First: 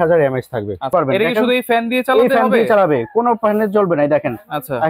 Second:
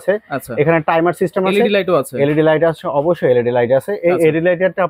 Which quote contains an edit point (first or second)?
first